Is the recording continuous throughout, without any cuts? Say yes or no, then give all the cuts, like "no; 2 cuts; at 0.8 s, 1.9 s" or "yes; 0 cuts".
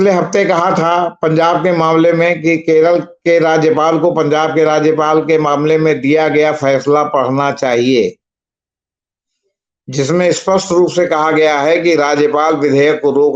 yes; 0 cuts